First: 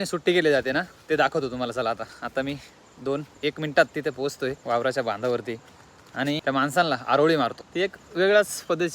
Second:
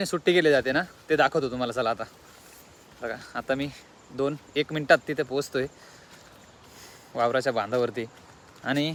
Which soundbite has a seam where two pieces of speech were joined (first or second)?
first